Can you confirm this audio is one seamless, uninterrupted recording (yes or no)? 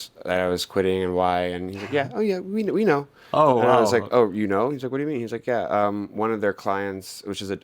yes